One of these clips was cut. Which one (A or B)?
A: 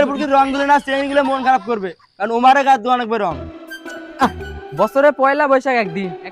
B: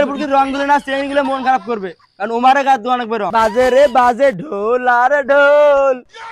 B